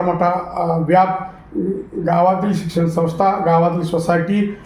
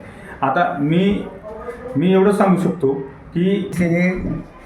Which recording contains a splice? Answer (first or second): second